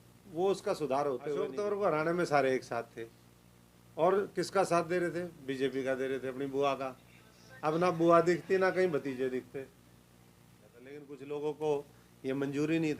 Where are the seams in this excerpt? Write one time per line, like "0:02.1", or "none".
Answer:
0:01.5
0:11.1